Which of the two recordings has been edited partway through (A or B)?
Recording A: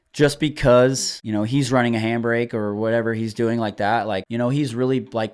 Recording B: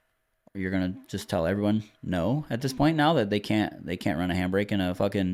A